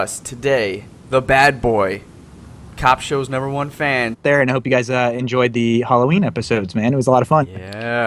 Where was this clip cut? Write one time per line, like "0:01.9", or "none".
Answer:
none